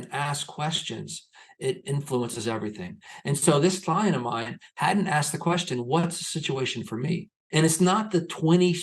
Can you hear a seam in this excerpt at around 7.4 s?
yes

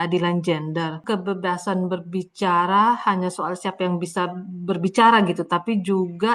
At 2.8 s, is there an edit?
no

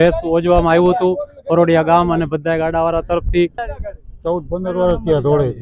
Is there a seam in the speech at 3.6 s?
yes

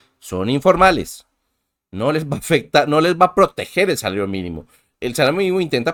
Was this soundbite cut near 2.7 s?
no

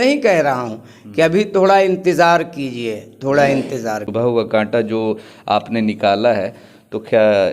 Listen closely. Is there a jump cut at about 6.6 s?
no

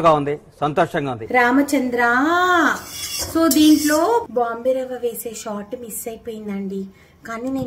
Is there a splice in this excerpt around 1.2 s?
yes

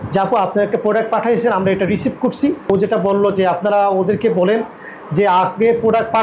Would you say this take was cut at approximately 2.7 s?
yes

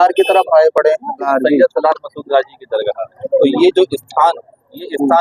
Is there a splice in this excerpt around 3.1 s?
yes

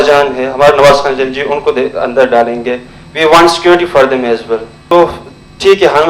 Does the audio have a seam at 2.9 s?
no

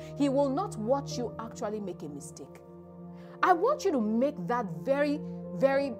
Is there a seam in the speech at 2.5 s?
no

